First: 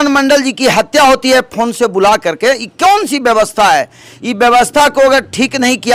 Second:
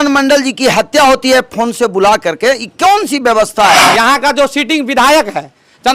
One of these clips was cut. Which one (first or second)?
second